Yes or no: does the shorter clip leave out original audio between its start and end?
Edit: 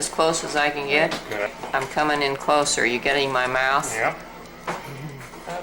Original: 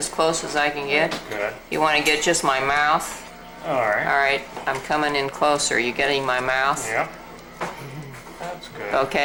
yes